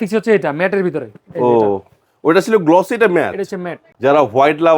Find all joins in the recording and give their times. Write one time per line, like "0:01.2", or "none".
0:03.8

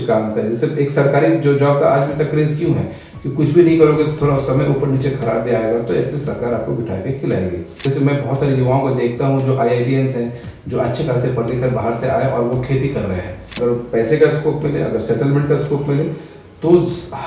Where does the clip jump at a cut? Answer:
0:07.8
0:13.5

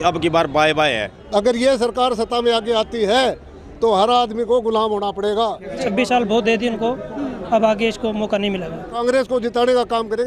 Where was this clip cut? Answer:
0:01.1
0:05.7
0:09.0

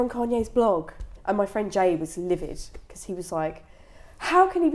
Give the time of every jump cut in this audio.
0:01.0

